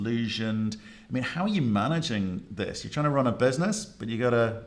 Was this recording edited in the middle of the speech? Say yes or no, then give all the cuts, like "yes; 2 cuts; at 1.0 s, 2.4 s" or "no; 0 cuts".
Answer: no; 0 cuts